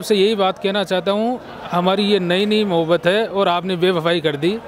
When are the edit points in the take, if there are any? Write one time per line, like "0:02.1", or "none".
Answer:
none